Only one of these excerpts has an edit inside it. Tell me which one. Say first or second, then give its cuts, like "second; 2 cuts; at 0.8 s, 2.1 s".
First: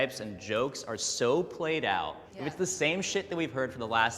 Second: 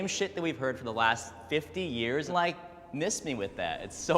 second; 1 cut; at 2.3 s